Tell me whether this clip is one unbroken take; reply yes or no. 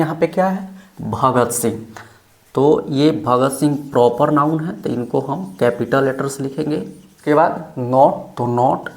no